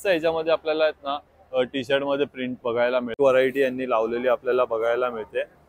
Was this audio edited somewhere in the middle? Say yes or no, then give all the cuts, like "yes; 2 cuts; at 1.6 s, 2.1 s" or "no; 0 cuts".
yes; 1 cut; at 3.2 s